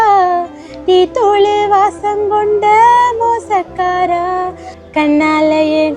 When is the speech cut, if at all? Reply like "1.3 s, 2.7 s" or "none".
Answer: 4.7 s